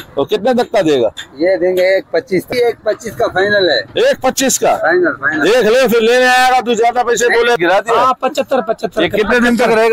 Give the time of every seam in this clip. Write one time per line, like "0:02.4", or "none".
0:02.5
0:07.6

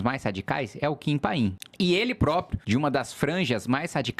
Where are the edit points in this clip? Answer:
0:01.6
0:02.6

